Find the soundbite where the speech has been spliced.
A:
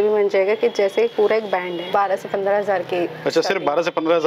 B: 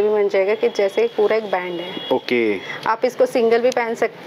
A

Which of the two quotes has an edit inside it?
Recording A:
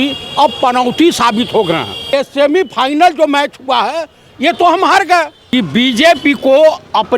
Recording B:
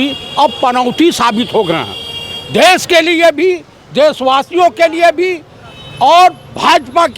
A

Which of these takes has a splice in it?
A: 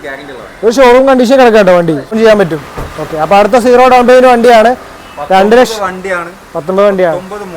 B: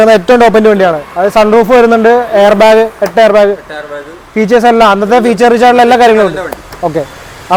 A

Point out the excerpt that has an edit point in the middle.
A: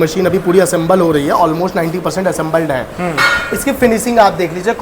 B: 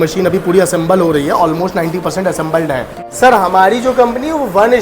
B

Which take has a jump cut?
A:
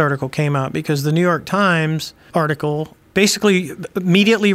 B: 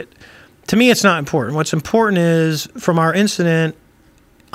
A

